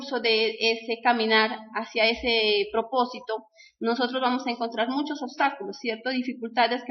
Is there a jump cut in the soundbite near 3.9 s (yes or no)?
no